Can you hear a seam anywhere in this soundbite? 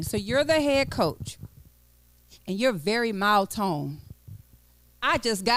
no; 0 cuts

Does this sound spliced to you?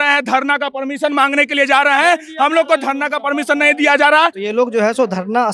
no; 0 cuts

